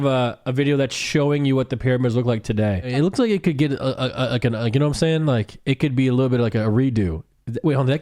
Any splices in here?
yes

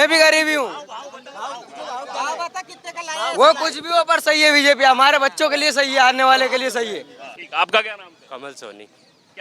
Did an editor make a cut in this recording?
no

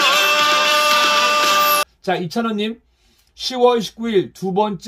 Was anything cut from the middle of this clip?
yes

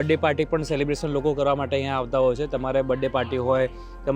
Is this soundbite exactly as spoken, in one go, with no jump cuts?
yes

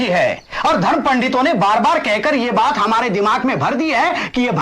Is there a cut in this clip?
no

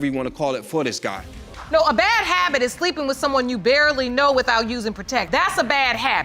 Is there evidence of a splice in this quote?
yes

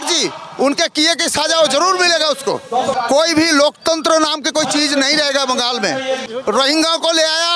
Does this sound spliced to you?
yes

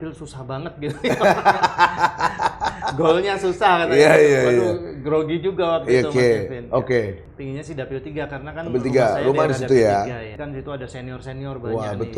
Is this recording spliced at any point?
yes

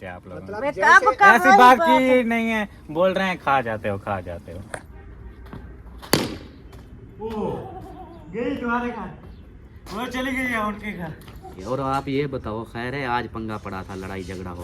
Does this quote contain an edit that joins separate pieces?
yes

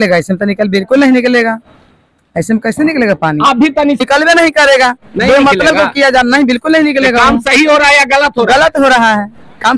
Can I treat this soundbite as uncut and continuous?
no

